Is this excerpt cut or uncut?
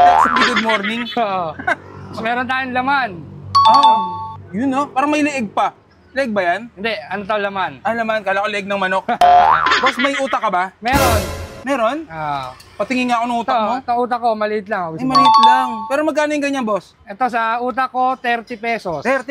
uncut